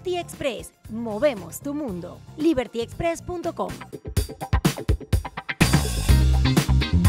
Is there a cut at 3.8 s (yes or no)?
yes